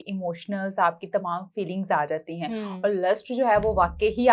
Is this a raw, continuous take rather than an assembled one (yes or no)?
yes